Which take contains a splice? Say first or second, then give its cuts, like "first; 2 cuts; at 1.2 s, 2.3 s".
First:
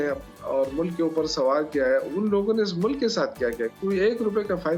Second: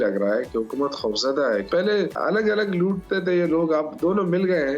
second; 1 cut; at 1.9 s